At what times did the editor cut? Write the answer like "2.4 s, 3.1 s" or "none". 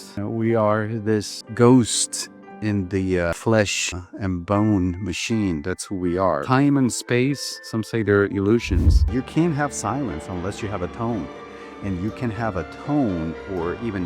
1.4 s, 3.3 s, 9.0 s